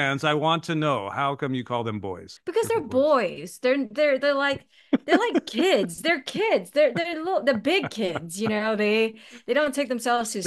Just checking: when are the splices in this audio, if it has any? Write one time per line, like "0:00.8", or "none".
0:02.3

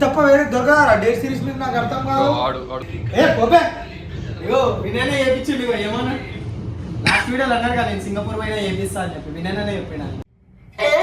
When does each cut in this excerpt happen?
0:02.8

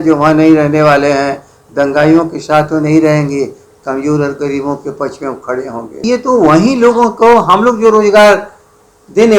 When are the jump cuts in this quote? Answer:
0:06.0

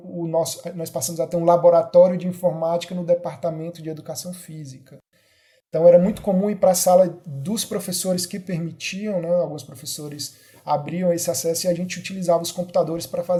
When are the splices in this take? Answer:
none

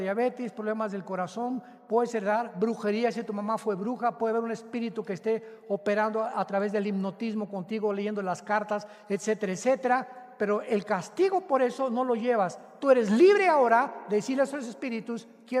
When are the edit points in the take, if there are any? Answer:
0:12.7

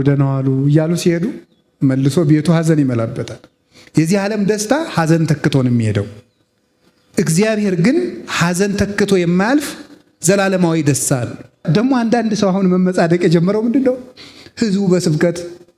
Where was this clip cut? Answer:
0:11.6

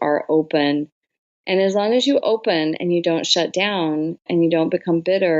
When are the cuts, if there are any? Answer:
none

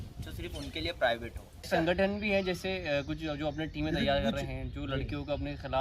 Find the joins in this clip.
0:01.7

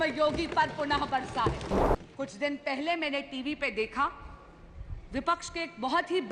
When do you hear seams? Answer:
0:01.8

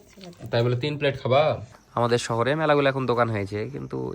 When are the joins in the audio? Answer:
0:01.8

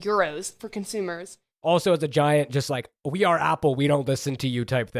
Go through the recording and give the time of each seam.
0:01.4

